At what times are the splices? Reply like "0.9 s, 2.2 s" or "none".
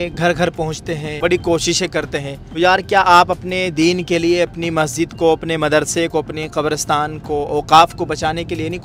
1.1 s, 2.4 s